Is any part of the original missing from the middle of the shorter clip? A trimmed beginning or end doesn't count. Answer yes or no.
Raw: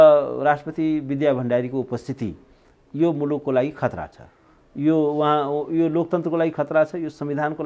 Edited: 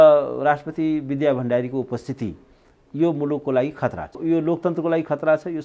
yes